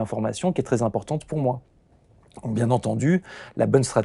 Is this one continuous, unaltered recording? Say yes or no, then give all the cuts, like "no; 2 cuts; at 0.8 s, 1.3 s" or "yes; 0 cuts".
yes; 0 cuts